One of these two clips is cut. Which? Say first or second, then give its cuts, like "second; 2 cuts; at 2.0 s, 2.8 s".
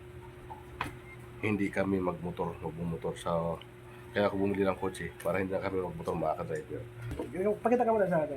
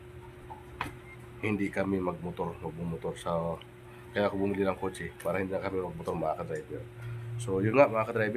first; 1 cut; at 7.2 s